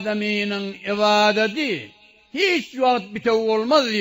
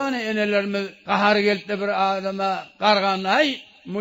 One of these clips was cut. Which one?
second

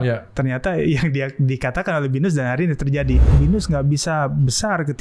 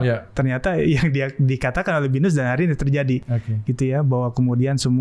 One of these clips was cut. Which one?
first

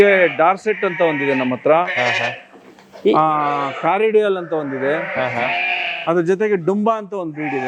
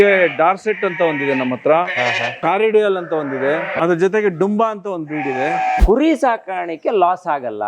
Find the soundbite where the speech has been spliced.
second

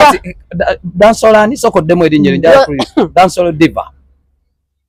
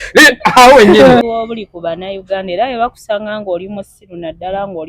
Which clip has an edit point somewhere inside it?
second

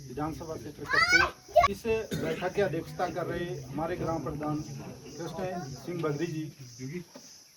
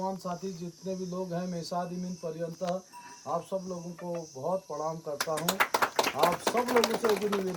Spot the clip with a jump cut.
first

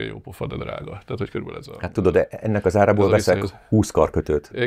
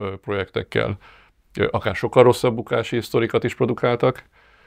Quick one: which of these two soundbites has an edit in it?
first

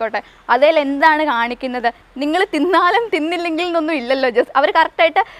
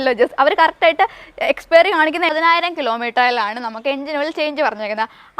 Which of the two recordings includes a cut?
second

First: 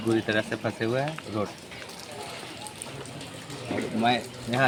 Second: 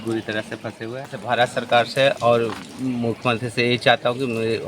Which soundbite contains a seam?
second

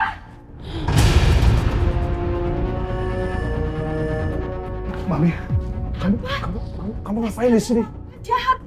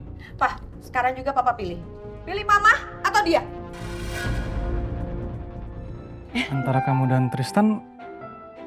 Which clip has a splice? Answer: second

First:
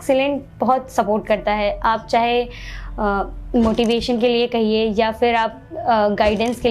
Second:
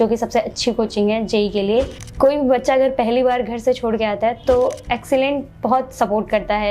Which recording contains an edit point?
second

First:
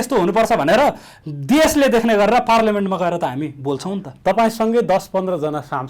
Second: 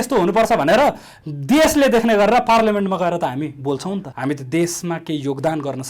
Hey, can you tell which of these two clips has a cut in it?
second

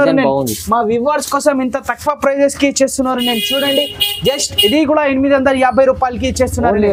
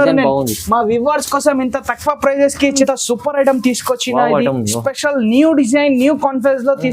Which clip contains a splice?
second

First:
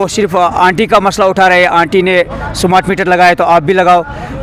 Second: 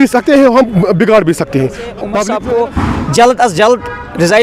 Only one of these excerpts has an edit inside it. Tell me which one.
second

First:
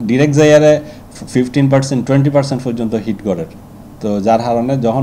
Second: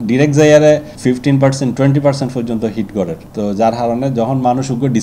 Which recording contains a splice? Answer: second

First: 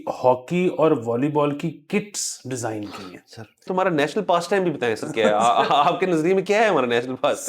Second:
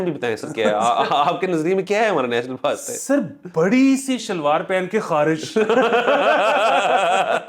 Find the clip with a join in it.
first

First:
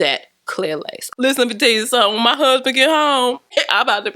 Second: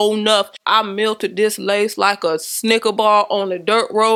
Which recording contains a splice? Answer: first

